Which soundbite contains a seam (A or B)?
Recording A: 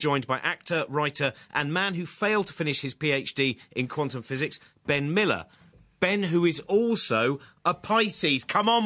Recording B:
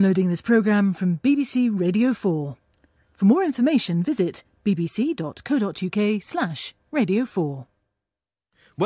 A